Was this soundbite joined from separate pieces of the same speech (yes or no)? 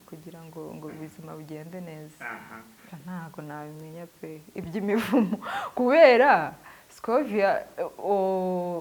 yes